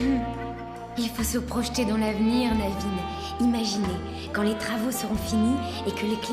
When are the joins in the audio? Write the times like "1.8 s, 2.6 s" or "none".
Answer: none